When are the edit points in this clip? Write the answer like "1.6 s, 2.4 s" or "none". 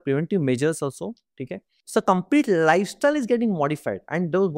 1.7 s